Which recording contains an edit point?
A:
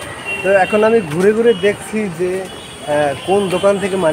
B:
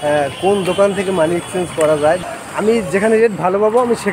B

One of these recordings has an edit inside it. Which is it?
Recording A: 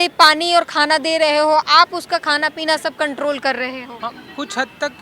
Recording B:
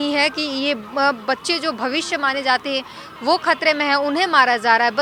A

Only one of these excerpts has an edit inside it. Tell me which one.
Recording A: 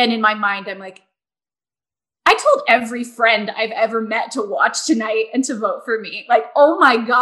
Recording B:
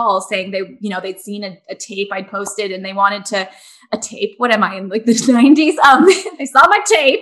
B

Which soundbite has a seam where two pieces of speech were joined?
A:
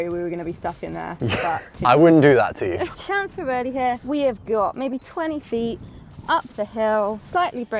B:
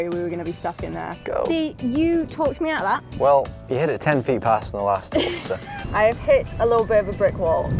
B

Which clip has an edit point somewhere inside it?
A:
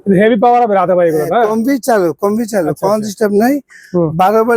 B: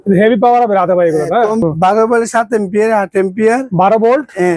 B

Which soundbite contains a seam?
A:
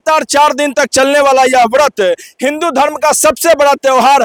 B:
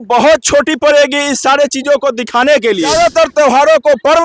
B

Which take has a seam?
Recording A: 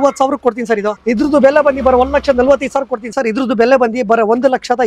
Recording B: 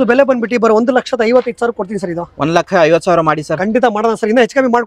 A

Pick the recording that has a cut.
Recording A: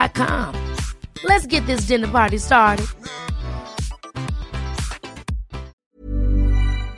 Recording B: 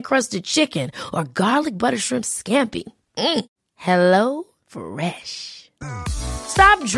A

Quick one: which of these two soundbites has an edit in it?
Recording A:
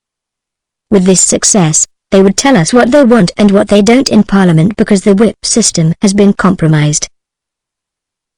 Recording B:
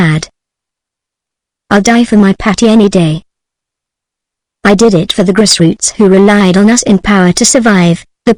A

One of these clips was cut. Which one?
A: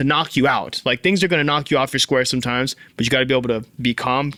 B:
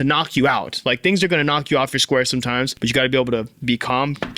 B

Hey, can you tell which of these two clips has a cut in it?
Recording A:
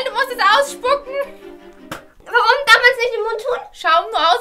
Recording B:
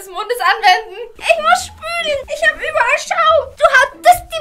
B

